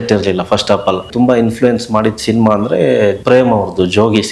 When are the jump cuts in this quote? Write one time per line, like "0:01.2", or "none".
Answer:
0:01.1
0:03.2